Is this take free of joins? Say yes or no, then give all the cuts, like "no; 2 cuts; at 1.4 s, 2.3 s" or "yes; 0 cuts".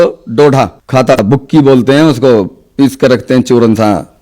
no; 1 cut; at 1.2 s